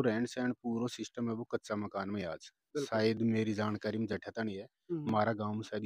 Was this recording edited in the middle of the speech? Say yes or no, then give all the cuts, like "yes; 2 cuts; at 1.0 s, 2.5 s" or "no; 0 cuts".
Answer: no; 0 cuts